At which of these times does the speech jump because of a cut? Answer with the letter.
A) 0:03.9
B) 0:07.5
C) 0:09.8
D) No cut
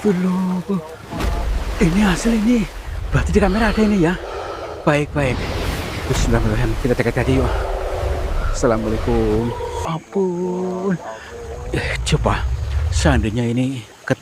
C